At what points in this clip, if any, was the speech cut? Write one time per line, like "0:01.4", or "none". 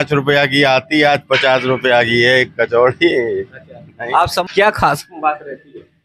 0:04.3